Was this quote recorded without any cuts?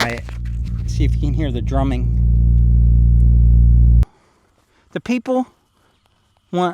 no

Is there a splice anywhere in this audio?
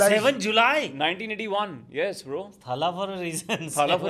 no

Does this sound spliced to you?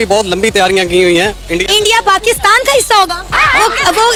no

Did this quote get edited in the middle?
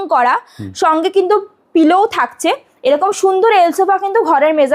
no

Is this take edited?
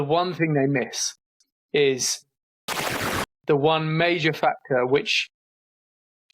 yes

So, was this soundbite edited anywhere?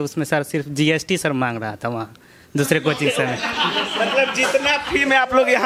no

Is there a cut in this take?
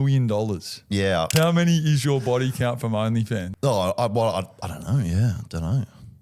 yes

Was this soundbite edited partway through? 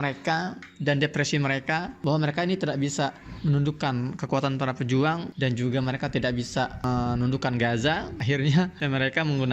yes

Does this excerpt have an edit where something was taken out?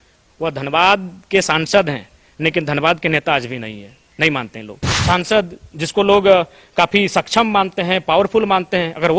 yes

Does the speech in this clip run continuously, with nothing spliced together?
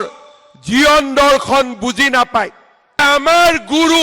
no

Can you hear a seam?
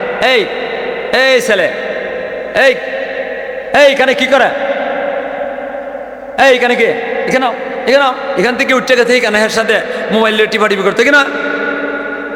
no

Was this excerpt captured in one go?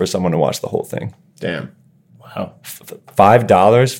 yes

